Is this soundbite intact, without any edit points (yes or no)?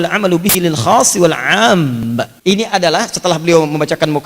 no